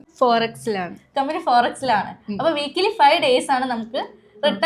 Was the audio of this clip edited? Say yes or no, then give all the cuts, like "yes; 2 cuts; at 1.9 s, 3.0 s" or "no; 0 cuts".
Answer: no; 0 cuts